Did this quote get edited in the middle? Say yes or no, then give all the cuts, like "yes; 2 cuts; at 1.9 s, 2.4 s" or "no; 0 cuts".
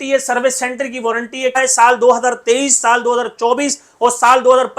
yes; 1 cut; at 1.6 s